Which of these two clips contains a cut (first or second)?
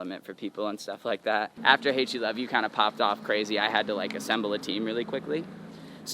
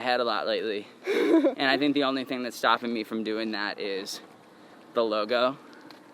first